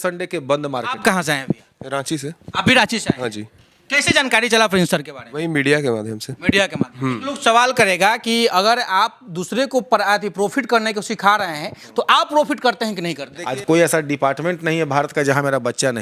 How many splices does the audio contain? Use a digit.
3